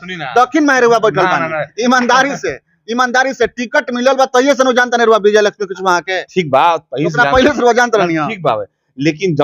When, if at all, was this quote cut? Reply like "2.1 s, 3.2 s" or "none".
none